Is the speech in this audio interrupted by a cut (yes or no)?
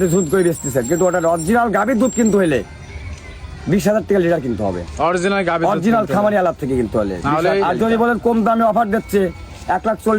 yes